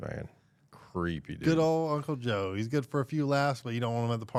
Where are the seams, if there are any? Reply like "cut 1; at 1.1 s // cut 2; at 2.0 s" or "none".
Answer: none

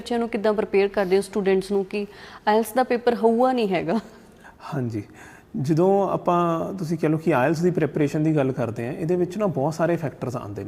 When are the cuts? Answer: none

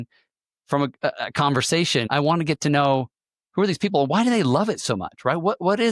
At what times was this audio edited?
cut 1; at 2.1 s

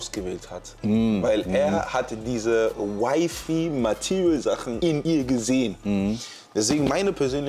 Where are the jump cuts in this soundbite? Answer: cut 1; at 4.9 s

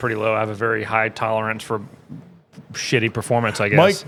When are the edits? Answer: none

